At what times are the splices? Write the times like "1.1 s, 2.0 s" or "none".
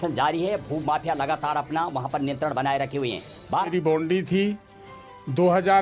3.7 s

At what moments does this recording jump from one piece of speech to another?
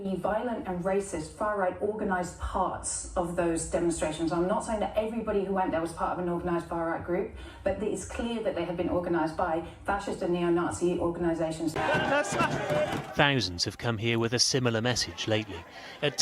11.7 s

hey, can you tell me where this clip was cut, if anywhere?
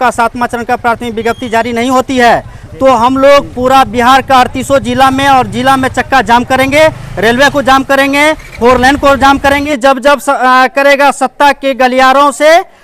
9.7 s

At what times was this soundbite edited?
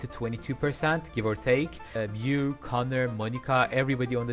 1.8 s

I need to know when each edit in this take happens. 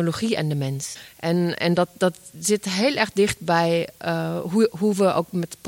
1.1 s

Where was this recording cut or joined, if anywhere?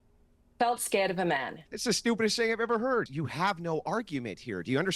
1.7 s, 3.1 s

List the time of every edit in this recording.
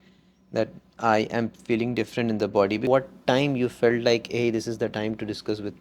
2.8 s

